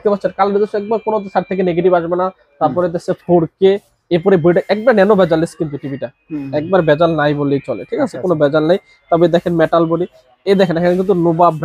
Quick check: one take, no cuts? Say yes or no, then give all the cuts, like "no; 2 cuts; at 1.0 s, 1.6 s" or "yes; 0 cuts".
yes; 0 cuts